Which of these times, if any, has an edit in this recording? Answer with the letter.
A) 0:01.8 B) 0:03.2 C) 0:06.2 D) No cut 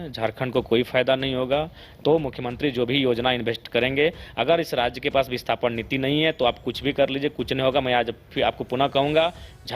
A